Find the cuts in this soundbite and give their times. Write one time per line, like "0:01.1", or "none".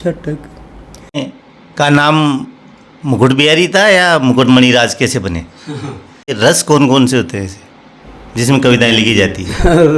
0:01.2
0:06.3